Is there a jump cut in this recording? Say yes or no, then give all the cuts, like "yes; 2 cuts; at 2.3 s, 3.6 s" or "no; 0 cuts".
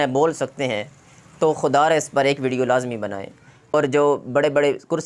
yes; 1 cut; at 3.7 s